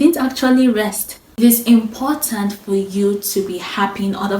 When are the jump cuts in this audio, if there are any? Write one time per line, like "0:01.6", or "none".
0:01.3